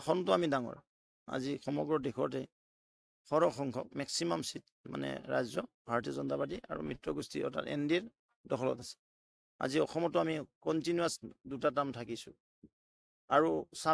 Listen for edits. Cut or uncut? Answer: uncut